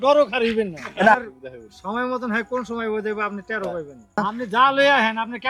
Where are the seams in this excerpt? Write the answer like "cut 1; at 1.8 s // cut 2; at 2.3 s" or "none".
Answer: cut 1; at 1.1 s // cut 2; at 4.2 s